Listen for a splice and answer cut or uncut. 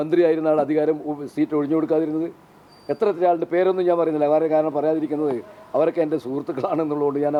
uncut